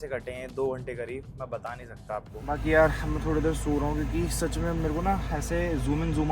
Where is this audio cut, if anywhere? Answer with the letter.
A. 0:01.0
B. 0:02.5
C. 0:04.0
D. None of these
B